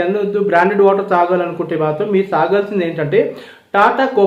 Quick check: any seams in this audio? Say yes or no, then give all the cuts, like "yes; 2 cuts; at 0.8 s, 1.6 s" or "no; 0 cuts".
no; 0 cuts